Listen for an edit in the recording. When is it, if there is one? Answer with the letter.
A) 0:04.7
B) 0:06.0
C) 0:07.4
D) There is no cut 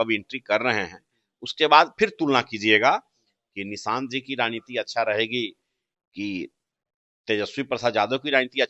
D